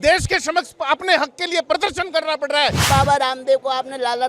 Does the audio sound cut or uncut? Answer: cut